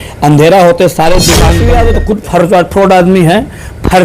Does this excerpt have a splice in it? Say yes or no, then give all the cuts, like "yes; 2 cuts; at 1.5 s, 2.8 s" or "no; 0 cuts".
yes; 1 cut; at 1.6 s